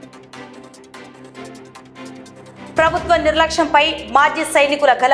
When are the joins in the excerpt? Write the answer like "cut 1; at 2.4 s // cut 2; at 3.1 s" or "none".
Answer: cut 1; at 1.3 s